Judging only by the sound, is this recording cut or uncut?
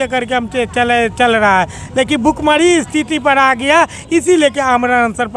uncut